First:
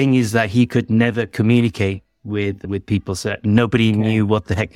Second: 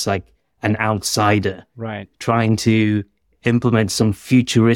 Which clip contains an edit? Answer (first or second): first